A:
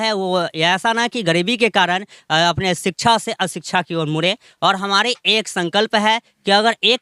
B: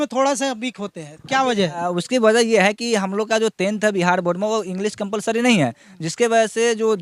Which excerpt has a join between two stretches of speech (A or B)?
A